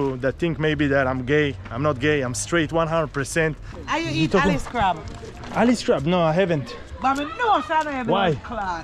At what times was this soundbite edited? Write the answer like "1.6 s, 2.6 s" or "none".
3.7 s